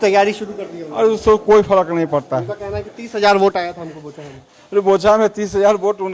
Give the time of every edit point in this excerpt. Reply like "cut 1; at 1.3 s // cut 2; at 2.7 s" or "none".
none